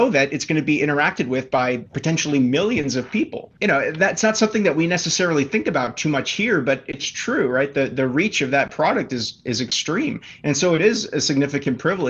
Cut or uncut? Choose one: uncut